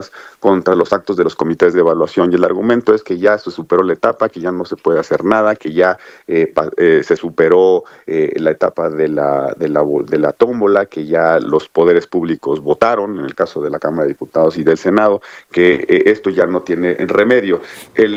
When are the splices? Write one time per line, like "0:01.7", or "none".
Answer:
none